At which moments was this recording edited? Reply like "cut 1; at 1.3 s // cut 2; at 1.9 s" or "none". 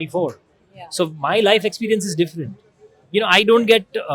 none